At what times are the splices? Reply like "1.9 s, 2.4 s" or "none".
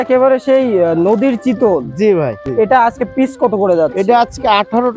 2.4 s